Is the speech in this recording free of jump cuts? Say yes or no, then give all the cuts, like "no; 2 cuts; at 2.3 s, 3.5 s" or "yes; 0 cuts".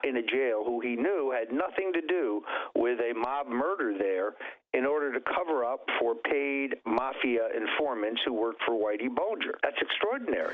no; 1 cut; at 9.6 s